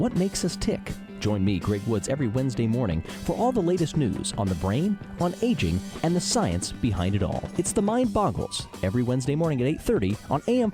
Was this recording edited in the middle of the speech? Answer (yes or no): no